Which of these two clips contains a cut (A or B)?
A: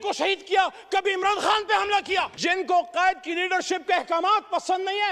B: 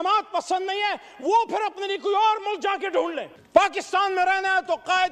A